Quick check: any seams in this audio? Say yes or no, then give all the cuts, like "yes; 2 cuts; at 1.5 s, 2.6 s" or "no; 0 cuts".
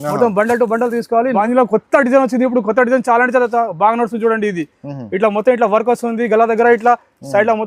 yes; 1 cut; at 1.4 s